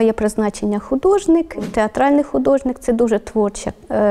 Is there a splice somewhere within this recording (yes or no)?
yes